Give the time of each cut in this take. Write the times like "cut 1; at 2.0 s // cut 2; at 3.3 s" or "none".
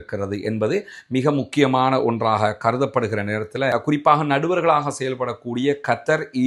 cut 1; at 3.7 s